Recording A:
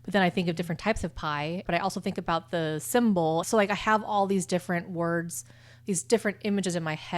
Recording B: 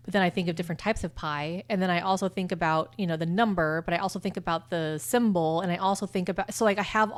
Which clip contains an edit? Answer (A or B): A